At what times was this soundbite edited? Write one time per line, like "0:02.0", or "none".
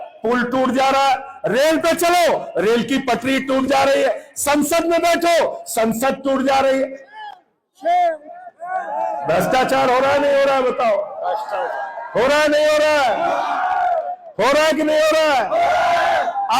none